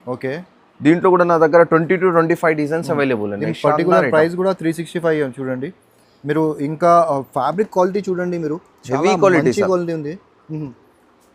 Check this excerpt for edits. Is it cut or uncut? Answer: uncut